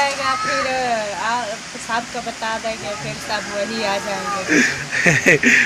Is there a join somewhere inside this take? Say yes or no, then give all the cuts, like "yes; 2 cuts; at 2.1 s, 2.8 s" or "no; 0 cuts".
no; 0 cuts